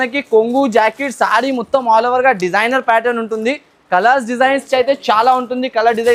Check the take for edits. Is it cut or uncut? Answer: uncut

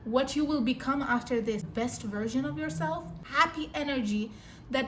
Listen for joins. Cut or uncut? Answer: cut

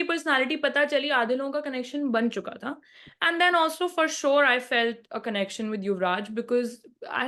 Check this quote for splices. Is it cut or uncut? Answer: uncut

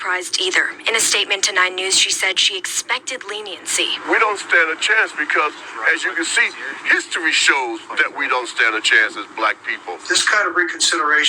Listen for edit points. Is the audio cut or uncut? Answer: cut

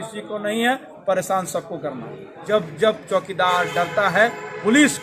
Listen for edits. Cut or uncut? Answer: cut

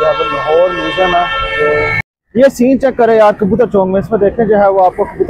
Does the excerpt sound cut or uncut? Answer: cut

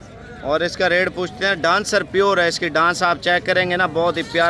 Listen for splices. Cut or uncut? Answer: uncut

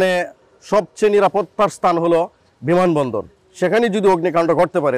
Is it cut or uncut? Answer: uncut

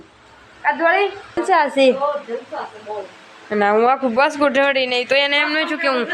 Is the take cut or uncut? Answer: cut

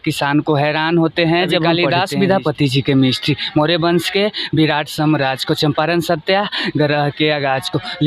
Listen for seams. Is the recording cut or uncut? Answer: cut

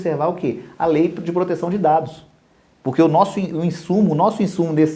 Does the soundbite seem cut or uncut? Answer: uncut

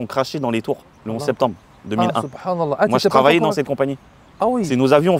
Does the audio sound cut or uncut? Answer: cut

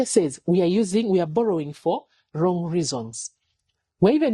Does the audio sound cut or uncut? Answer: uncut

